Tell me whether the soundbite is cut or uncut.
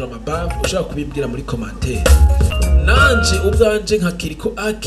cut